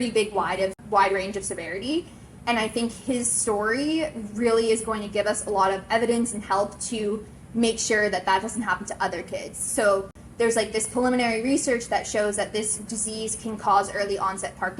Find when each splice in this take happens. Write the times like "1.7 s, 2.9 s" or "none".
none